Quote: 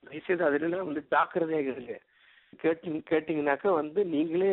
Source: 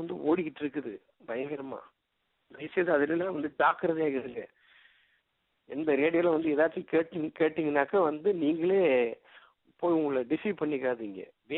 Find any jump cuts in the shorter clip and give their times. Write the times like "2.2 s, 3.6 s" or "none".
2.5 s